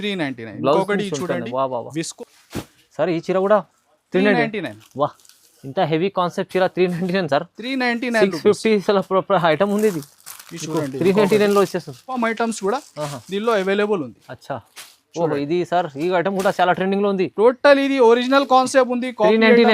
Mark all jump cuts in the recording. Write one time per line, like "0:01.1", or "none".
0:02.1
0:12.2